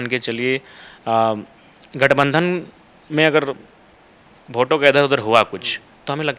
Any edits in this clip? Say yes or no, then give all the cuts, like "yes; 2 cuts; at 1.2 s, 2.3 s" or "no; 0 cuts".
no; 0 cuts